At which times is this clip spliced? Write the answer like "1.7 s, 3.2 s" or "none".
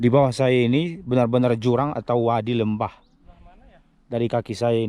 none